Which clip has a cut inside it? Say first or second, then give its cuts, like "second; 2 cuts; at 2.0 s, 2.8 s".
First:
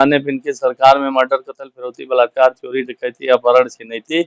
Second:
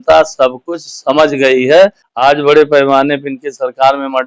second; 1 cut; at 2.0 s